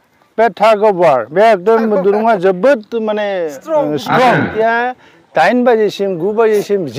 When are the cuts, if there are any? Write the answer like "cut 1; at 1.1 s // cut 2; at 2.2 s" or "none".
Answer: cut 1; at 4.5 s